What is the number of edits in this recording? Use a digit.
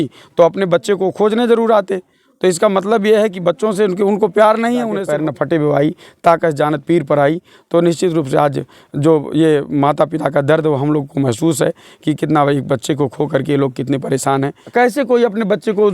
2